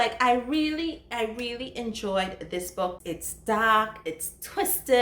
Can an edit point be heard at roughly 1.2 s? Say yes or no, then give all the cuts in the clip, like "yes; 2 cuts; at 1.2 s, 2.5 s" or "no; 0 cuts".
no; 1 cut; at 3.0 s